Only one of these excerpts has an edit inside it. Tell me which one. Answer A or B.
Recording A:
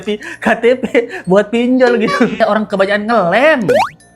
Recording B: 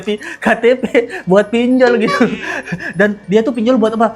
A